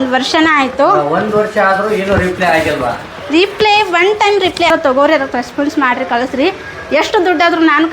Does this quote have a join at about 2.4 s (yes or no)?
no